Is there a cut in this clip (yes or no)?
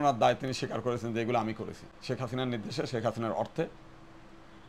no